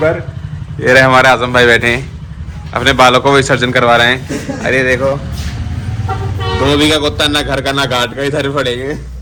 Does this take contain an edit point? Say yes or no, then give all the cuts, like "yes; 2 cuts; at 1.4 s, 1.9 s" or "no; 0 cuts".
no; 0 cuts